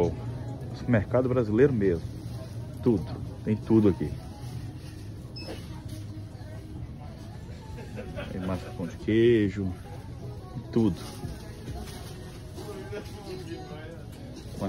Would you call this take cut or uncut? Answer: cut